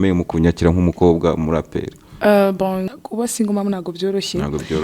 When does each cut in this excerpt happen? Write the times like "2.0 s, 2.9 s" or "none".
2.9 s